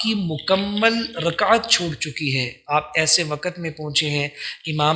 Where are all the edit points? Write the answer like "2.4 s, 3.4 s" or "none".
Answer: none